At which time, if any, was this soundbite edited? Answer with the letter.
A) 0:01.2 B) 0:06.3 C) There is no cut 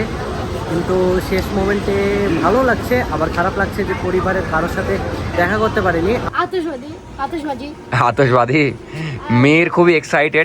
B